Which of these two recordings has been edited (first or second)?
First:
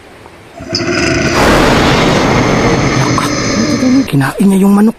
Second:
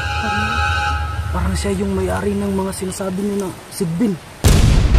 first